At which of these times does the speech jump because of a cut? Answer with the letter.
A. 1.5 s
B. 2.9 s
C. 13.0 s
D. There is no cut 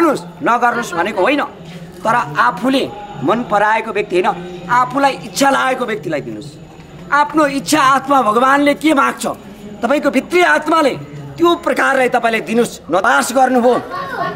C